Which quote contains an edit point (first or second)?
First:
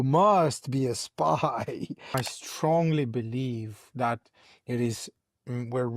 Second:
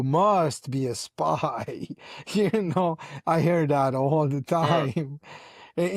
first